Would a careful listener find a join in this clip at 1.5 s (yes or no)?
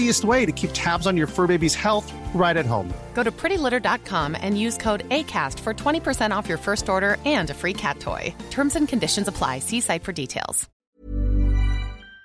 no